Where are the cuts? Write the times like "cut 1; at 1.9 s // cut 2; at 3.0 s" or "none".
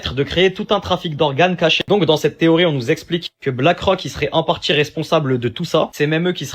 cut 1; at 1.9 s